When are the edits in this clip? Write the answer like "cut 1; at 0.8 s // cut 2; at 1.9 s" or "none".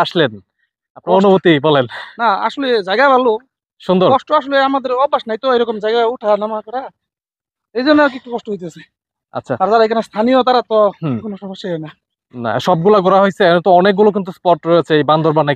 none